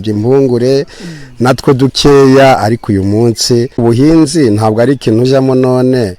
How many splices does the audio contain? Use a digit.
1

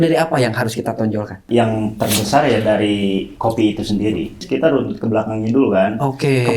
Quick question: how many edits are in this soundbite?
2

